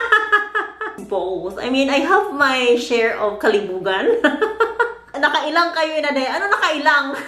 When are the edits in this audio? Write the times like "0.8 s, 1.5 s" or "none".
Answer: 1.0 s, 5.0 s